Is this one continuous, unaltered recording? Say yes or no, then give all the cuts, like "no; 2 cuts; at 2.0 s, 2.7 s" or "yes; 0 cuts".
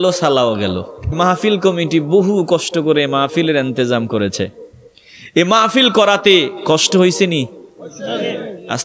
no; 1 cut; at 1.1 s